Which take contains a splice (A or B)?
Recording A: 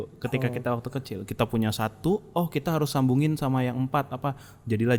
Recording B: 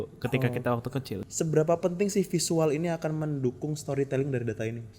B